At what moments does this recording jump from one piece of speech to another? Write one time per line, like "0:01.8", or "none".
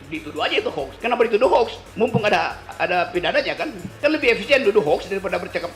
0:00.9
0:02.6
0:03.8